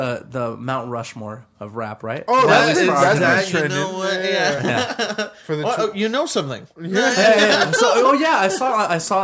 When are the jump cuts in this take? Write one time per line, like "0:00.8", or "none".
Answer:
none